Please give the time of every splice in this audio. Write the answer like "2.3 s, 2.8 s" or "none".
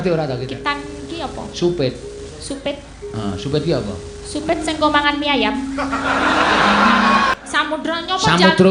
7.3 s

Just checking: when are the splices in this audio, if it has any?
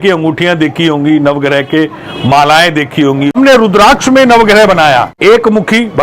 3.4 s, 5.1 s

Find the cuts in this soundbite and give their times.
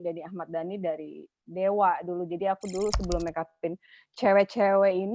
none

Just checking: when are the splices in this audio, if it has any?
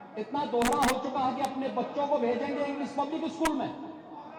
none

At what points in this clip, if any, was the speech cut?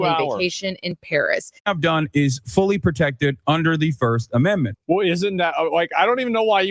1.5 s

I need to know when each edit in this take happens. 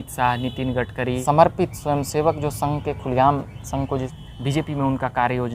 1.2 s, 4.1 s

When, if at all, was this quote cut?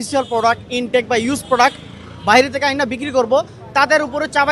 none

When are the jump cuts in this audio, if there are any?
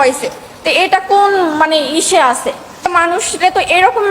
2.8 s

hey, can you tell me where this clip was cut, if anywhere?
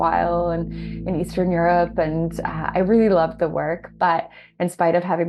none

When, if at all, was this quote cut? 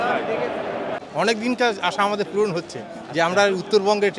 1.0 s

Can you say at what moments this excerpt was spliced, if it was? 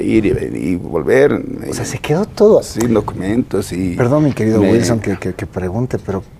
none

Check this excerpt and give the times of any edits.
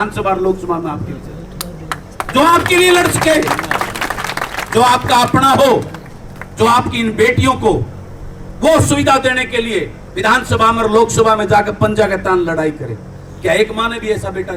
none

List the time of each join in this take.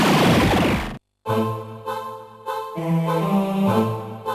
none

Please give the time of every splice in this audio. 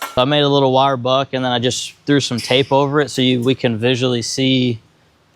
none

